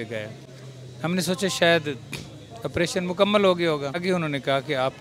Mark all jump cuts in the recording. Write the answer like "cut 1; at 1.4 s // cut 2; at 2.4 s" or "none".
cut 1; at 4.0 s